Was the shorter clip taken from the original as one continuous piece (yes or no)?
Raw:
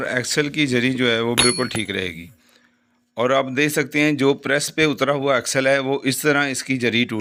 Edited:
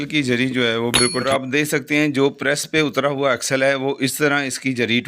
no